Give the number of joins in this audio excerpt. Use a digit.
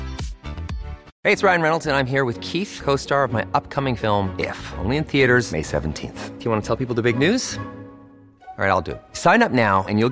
1